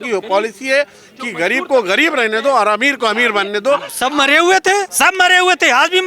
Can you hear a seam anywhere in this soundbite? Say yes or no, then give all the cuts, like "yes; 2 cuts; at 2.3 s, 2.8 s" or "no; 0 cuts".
yes; 2 cuts; at 3.9 s, 4.9 s